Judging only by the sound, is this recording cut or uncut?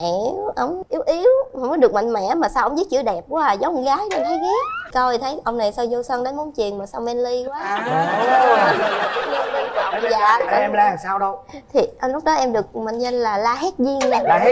cut